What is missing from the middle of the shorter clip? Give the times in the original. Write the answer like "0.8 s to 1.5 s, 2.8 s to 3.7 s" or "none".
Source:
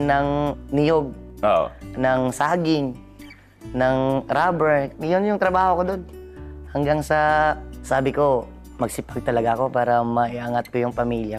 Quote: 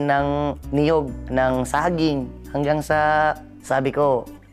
1.2 s to 1.9 s, 3.0 s to 6.6 s